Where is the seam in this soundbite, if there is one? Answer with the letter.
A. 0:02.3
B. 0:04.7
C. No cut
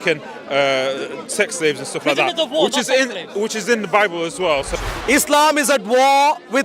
B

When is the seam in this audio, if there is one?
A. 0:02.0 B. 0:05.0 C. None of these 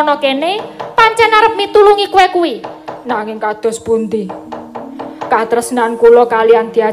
A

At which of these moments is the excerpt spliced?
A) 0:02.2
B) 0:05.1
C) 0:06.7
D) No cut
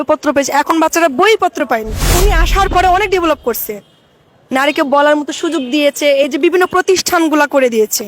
A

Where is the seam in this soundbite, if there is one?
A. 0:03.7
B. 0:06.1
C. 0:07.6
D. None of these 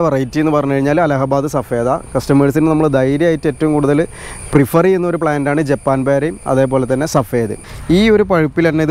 C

